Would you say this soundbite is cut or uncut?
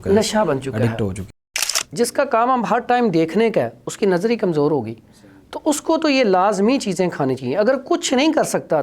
cut